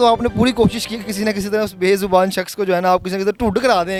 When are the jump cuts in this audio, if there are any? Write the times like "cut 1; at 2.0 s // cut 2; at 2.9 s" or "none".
none